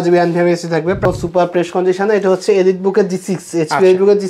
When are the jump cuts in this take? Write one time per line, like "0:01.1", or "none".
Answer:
0:01.0